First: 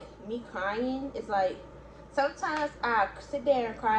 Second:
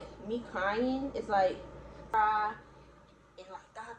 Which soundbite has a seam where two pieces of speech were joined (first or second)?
second